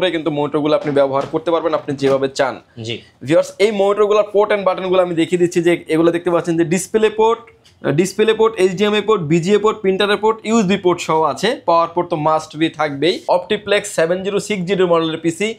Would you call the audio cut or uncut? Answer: cut